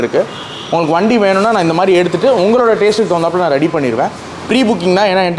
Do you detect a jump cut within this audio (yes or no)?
no